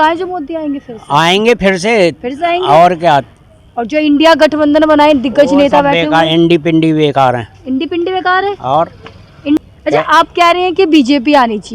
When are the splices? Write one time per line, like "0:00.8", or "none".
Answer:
0:09.7

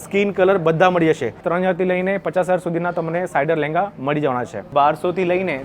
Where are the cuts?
0:01.4
0:04.7

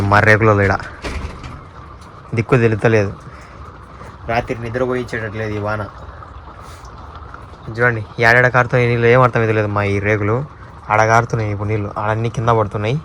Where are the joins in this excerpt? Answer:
none

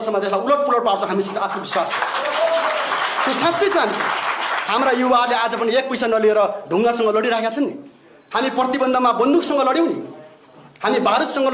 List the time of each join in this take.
none

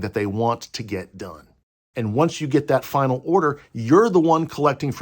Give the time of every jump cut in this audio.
0:01.6

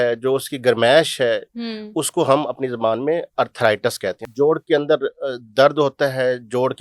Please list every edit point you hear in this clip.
0:04.2

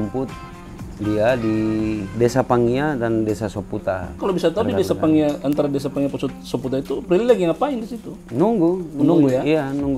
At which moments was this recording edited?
0:04.1

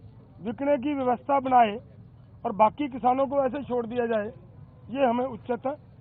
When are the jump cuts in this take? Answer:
none

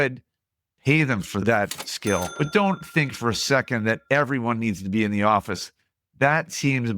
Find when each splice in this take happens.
0:01.4
0:02.3

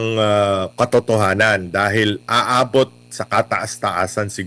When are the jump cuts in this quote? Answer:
none

